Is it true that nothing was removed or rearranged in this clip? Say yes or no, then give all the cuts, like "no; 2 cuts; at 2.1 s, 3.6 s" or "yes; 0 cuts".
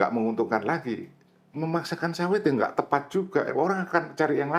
yes; 0 cuts